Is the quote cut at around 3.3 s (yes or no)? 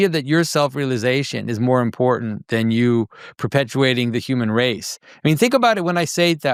no